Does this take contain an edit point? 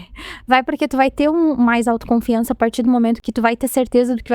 yes; 1 cut; at 3.2 s

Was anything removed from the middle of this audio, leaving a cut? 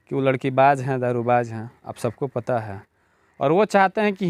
no; 0 cuts

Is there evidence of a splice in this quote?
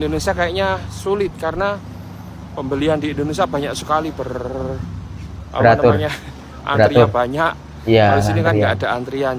no; 0 cuts

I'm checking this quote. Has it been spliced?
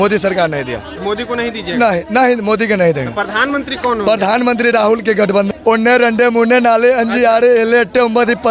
yes; 1 cut; at 5.5 s

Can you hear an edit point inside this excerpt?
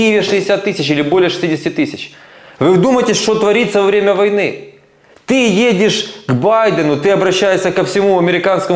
no; 0 cuts

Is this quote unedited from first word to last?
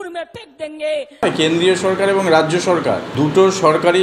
no; 2 cuts; at 1.2 s, 3.1 s

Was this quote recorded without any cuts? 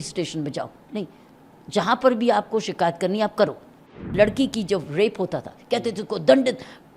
no; 1 cut; at 3.9 s

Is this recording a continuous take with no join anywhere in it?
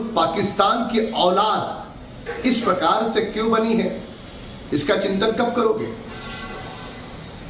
no; 1 cut; at 6.2 s

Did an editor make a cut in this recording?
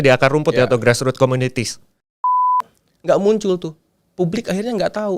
yes; 1 cut; at 2.5 s

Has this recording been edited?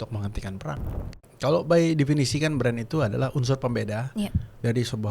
yes; 1 cut; at 1.2 s

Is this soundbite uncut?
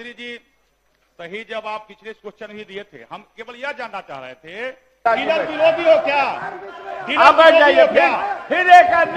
no; 1 cut; at 5.0 s

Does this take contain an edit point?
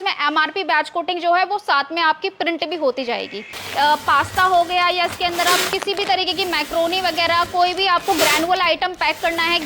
yes; 1 cut; at 3.6 s

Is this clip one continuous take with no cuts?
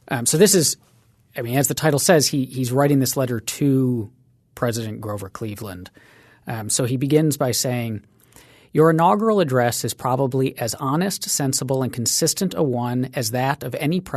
no; 1 cut; at 4.6 s

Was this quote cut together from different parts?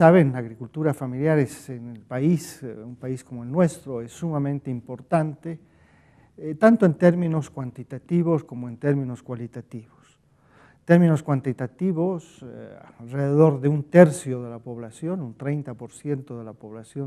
yes; 1 cut; at 8.7 s

